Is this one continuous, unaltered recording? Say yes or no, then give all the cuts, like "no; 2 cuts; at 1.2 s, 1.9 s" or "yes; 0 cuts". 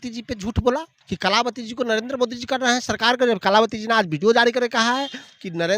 no; 1 cut; at 0.9 s